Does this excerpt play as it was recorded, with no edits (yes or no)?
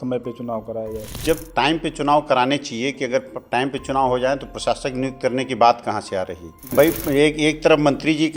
no